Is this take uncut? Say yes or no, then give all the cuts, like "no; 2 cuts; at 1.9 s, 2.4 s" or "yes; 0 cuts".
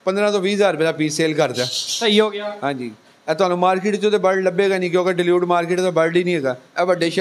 yes; 0 cuts